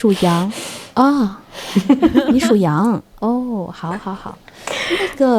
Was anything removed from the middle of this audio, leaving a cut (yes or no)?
no